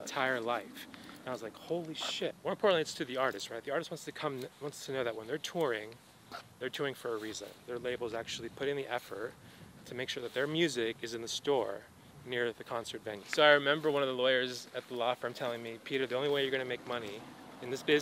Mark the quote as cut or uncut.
cut